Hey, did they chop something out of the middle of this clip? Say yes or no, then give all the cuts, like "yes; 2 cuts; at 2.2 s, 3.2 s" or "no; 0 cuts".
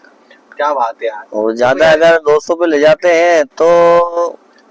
no; 0 cuts